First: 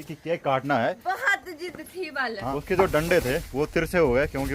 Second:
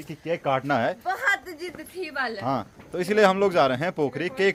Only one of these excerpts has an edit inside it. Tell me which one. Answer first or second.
first